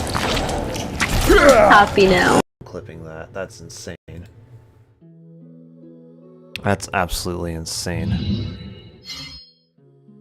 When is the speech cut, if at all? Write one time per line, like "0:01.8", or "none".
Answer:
0:02.4
0:04.0